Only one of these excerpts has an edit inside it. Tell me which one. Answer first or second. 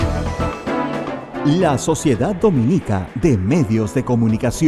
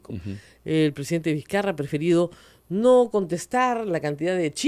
first